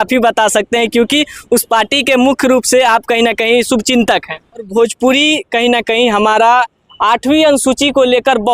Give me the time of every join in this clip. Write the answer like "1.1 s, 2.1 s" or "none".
4.7 s